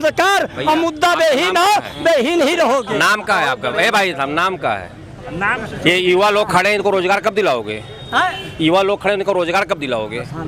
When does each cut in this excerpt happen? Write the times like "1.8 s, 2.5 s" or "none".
none